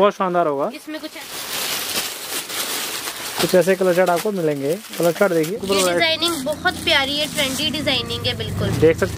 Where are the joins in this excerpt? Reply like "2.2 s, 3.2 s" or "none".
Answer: 1.1 s, 5.5 s

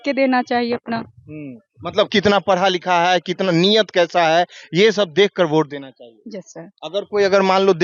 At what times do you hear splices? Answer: none

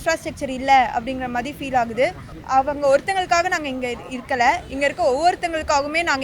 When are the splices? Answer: none

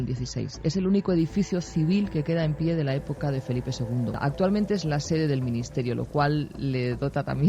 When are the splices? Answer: 4.2 s

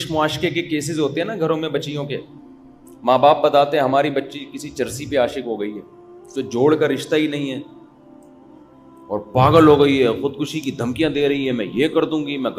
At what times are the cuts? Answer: none

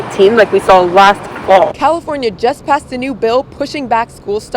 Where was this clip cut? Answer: 1.7 s

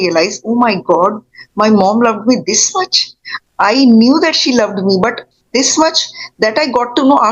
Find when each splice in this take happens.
none

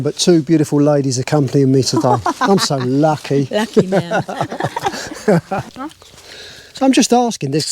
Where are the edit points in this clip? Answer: none

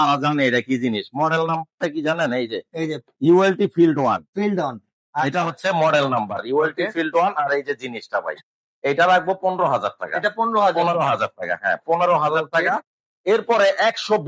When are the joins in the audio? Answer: none

